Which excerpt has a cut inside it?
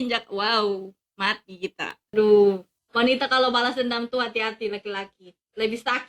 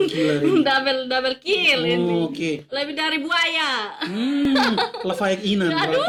first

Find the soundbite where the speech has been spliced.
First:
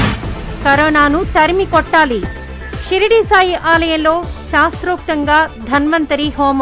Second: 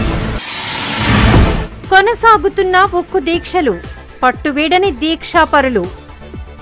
second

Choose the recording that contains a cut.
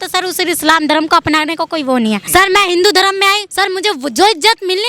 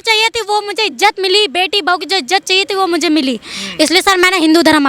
first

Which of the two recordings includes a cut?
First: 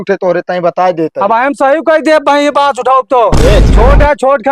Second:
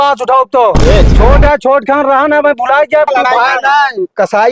second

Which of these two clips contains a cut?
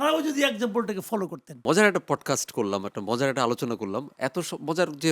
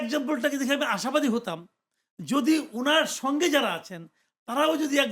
first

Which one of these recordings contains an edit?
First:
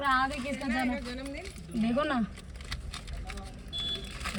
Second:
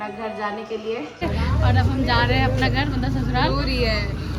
second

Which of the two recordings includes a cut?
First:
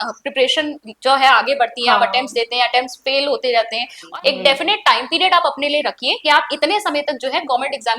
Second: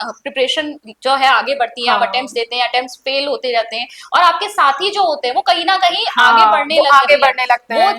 first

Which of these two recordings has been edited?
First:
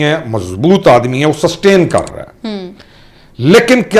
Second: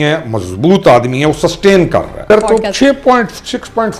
second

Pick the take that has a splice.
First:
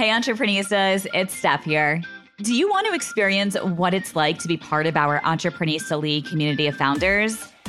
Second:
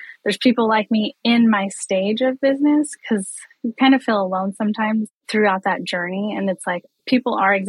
second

